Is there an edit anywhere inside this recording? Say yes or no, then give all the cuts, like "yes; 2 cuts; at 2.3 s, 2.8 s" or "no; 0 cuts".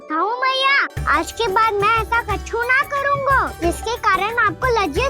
yes; 2 cuts; at 0.9 s, 3.5 s